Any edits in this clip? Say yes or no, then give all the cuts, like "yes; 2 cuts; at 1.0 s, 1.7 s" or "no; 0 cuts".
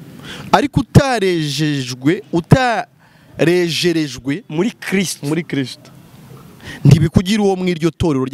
no; 0 cuts